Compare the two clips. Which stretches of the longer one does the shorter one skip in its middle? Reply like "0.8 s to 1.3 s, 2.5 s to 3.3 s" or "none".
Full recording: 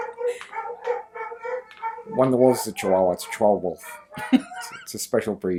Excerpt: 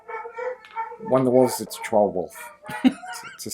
2.8 s to 3.2 s

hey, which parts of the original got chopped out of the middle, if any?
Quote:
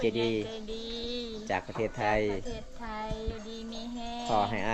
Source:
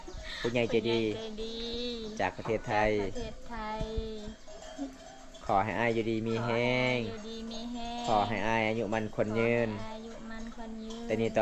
4.0 s to 7.1 s

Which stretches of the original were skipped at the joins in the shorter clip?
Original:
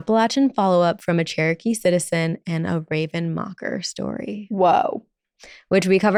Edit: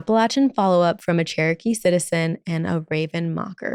none

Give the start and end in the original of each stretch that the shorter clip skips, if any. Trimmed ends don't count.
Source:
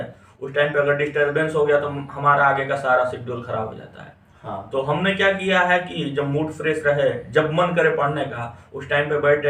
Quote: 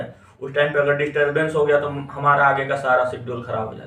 none

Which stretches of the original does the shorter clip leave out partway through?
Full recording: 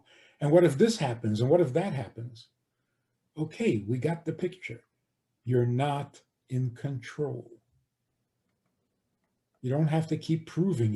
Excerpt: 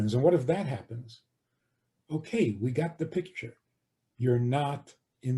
none

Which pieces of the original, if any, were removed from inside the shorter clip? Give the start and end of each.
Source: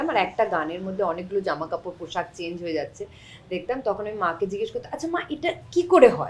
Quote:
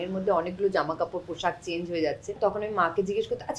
3.1 s to 3.8 s

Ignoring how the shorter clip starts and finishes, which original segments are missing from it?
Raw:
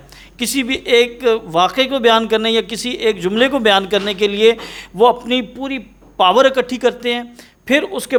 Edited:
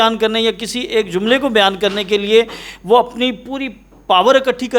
none

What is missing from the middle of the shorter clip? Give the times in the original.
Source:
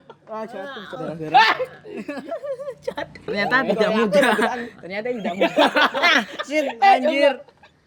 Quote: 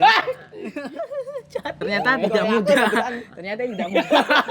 3.1 s to 3.2 s

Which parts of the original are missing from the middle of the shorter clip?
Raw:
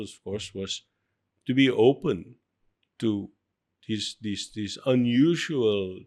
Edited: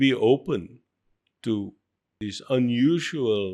3.7 s to 4.5 s

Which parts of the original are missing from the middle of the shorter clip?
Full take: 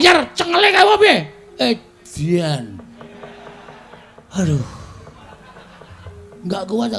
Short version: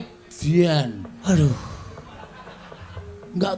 2.8 s to 4.2 s

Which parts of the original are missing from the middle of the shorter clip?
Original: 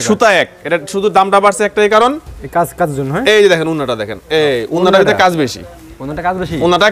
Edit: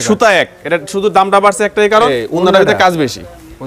2.1 s to 4.5 s

